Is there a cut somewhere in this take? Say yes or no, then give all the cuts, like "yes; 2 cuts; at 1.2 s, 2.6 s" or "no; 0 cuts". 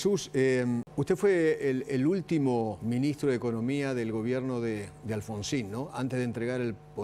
yes; 2 cuts; at 0.9 s, 2.8 s